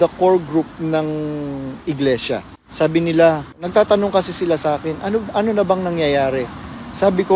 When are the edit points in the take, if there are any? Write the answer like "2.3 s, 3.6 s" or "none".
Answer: 2.6 s, 3.6 s